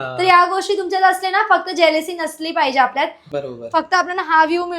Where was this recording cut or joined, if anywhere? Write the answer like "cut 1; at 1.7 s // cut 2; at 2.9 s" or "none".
cut 1; at 3.2 s